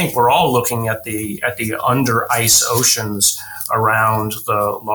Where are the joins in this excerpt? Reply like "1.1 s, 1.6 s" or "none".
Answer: none